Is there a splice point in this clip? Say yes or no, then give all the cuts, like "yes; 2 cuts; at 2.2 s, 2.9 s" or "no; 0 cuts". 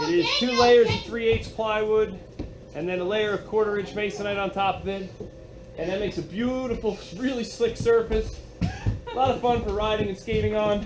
no; 0 cuts